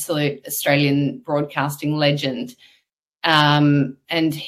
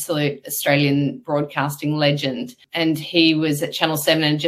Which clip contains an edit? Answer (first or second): second